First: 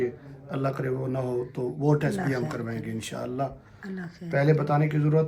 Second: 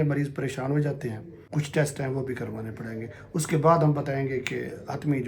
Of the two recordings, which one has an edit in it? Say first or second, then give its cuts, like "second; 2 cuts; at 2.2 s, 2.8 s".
second; 1 cut; at 1.4 s